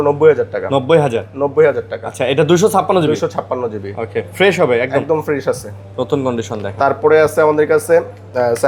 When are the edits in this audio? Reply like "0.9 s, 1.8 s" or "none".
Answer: none